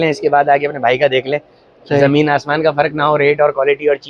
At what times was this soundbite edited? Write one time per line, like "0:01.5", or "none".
none